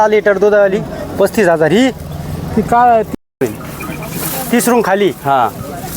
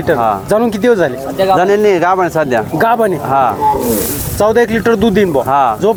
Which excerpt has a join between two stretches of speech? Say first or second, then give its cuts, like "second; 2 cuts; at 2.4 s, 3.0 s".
first; 1 cut; at 3.3 s